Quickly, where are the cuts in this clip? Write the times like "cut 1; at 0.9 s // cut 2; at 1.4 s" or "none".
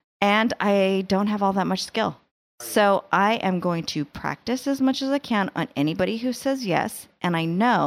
cut 1; at 2.6 s